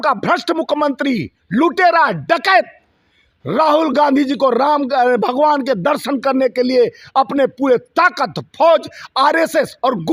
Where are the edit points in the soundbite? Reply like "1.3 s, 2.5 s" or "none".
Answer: none